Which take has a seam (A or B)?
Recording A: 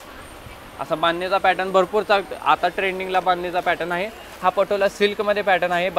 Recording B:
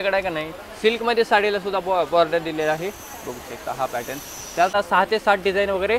B